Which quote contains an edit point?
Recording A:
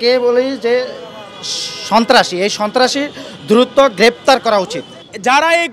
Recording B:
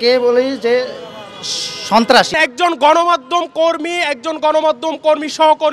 B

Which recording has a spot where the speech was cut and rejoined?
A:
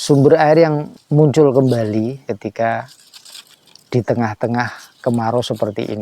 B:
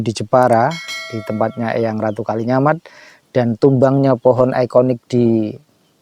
A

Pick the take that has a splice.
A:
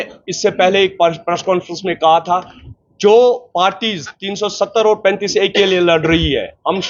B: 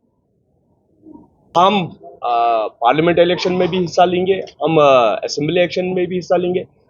B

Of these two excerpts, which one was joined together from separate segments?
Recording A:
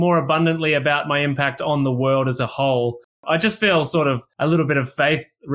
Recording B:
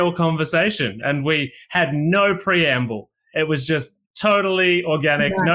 A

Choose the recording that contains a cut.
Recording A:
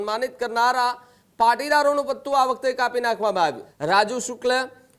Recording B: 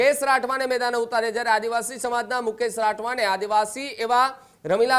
A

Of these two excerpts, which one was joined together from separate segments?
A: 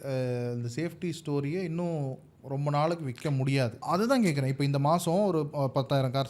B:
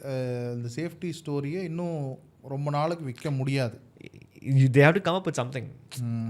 A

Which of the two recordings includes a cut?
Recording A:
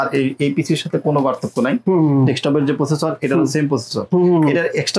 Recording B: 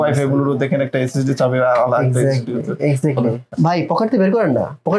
B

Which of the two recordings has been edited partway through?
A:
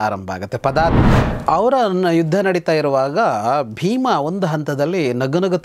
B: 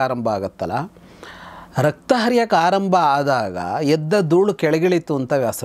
A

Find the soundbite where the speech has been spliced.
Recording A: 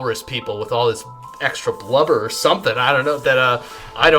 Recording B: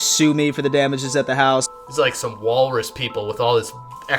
B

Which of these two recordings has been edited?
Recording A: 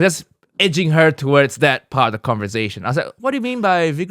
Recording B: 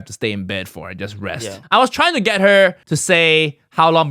B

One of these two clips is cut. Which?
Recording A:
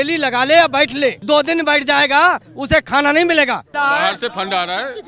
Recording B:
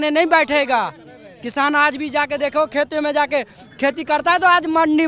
A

